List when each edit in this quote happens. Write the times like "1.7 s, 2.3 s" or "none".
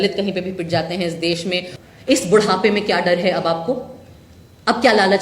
1.7 s

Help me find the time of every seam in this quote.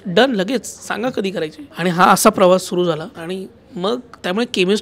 1.6 s, 3.1 s

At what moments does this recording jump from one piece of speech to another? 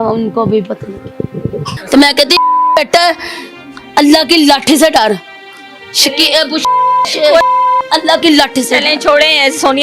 1.8 s

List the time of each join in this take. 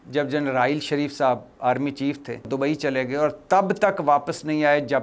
2.5 s

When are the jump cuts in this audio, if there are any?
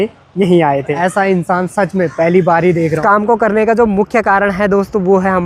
0.9 s, 3.0 s

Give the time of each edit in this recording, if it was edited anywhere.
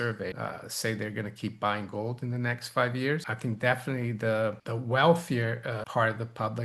3.3 s

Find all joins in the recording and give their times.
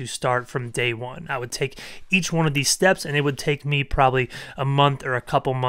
none

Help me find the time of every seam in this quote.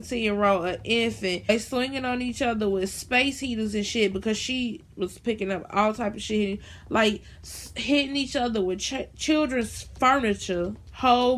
none

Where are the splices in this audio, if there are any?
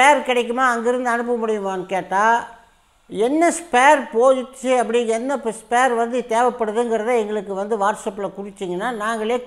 none

